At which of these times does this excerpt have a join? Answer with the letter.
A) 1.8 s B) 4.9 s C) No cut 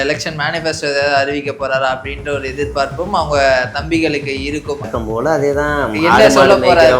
B